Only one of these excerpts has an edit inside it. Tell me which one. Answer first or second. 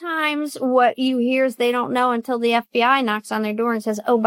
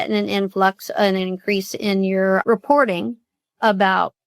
second